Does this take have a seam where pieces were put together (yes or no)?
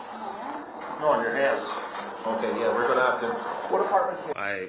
no